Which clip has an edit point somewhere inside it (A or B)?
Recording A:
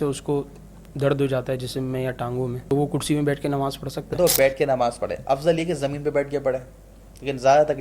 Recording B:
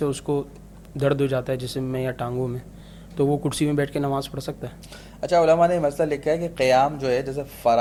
A